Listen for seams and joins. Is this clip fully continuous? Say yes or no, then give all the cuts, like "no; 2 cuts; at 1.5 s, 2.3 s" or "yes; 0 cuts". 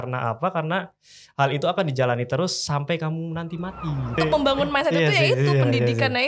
no; 1 cut; at 4.2 s